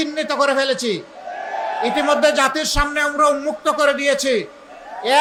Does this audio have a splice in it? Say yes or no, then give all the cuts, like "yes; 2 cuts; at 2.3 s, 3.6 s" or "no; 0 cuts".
no; 0 cuts